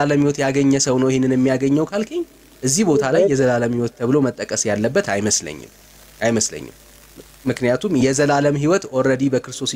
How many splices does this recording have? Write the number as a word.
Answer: zero